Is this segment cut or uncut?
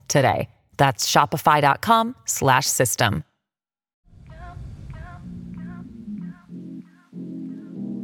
cut